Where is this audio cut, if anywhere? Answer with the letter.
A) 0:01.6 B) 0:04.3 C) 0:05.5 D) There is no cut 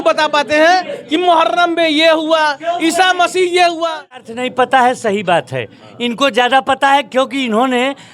B